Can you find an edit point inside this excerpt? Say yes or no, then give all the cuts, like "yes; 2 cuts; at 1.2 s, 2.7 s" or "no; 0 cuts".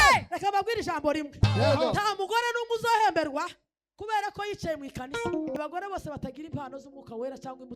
yes; 1 cut; at 5.6 s